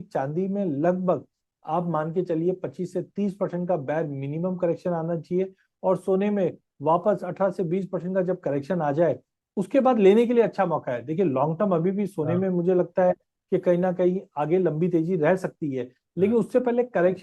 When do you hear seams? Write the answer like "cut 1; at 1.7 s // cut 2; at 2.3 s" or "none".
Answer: none